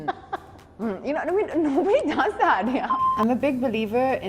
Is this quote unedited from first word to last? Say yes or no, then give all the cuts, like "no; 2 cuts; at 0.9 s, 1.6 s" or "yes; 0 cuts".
no; 1 cut; at 3.0 s